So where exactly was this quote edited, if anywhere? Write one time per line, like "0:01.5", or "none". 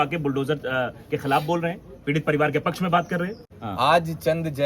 0:03.4